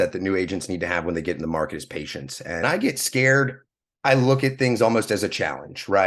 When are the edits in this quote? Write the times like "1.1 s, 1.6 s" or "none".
2.6 s

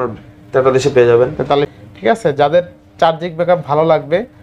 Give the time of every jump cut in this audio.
1.7 s

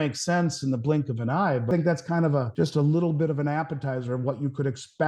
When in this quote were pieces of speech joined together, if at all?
1.7 s, 2.5 s

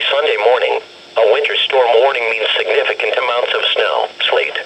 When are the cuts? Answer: 1.0 s

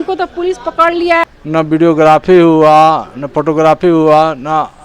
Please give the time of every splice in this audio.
1.2 s

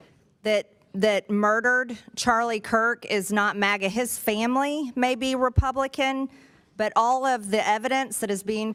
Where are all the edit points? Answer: none

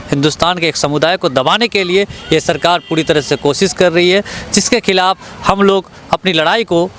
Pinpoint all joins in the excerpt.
none

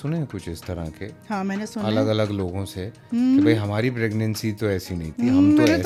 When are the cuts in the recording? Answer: none

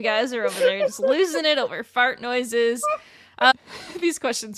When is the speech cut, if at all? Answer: 3.5 s

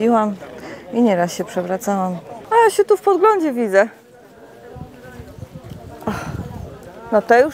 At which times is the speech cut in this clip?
2.3 s

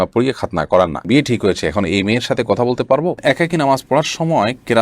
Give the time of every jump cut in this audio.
1.0 s, 3.2 s

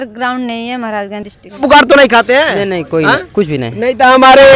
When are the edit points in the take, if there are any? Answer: 1.6 s

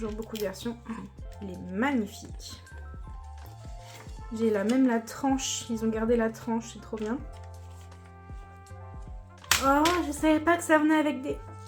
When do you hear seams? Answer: 7.2 s, 9.5 s

